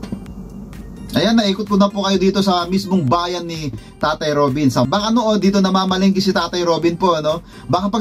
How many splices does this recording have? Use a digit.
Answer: 1